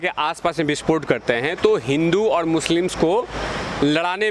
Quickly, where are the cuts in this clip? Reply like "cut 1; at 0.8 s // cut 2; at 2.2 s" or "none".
none